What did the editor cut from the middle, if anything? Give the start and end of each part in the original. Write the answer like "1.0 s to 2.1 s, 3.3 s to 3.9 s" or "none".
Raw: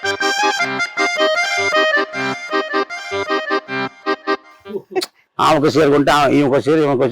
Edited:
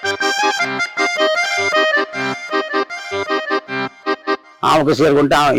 4.5 s to 5.3 s